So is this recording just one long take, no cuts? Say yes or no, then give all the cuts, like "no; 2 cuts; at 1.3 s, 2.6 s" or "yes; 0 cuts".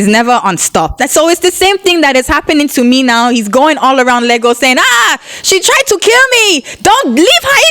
no; 1 cut; at 1.0 s